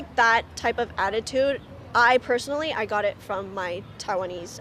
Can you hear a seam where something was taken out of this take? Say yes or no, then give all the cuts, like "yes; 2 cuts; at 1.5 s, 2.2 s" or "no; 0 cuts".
no; 0 cuts